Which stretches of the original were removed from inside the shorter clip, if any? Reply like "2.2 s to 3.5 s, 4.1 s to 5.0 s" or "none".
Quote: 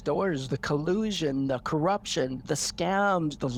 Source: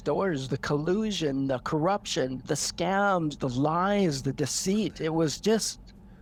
none